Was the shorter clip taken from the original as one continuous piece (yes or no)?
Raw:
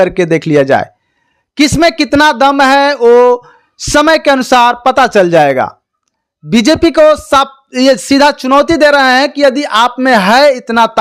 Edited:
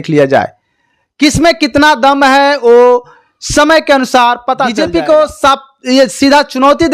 no